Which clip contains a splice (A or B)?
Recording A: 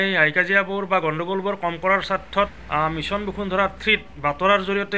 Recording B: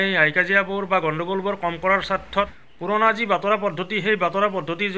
B